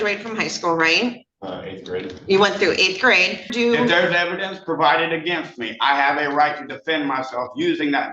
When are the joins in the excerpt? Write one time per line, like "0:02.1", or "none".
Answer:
0:03.5